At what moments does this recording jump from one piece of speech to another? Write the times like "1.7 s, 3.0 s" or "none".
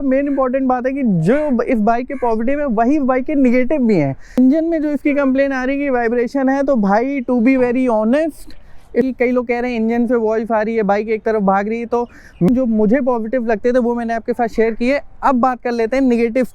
4.4 s, 9.1 s, 12.5 s